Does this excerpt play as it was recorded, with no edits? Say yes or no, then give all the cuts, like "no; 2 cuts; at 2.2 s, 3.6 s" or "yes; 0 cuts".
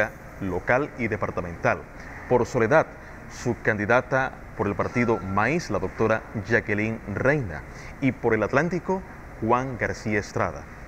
yes; 0 cuts